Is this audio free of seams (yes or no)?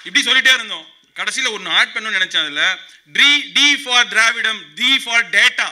yes